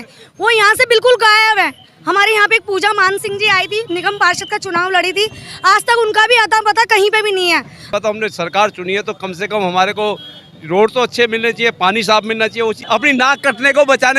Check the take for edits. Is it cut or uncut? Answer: cut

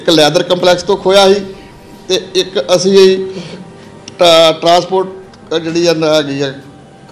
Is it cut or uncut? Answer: uncut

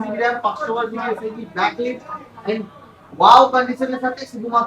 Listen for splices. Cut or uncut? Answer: uncut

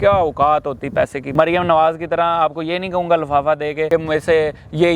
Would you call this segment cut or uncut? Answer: cut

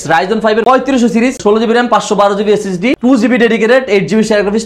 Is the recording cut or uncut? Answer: uncut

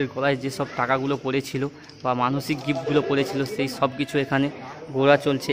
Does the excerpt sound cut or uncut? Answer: uncut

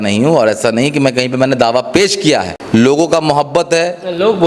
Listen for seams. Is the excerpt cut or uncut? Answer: cut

